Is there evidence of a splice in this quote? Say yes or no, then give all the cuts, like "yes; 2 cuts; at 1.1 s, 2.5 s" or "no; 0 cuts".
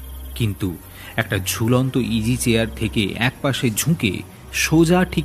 no; 0 cuts